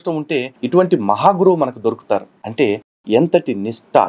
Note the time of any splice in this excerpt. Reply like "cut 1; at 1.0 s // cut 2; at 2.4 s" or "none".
cut 1; at 2.3 s